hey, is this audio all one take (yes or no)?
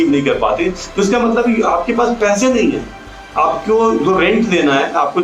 yes